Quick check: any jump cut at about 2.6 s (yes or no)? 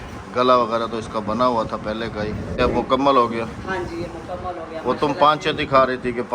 yes